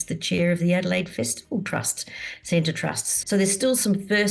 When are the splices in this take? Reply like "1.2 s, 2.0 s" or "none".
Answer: 3.1 s